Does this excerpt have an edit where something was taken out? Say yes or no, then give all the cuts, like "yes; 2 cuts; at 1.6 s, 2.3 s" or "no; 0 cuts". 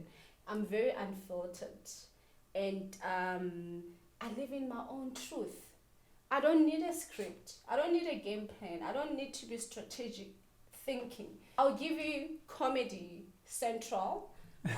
yes; 1 cut; at 11.6 s